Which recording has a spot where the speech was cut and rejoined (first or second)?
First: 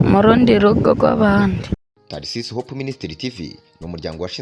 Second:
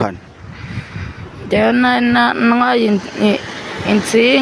first